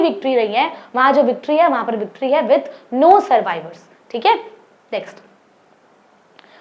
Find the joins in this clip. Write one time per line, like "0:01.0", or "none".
none